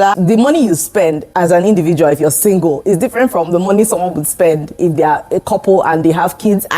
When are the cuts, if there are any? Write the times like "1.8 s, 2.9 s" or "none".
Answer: 1.3 s